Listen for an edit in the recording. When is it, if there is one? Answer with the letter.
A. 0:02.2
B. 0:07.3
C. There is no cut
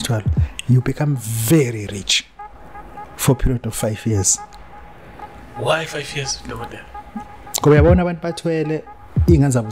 B